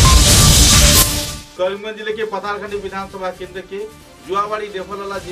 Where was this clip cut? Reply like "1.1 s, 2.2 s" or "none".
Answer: 1.1 s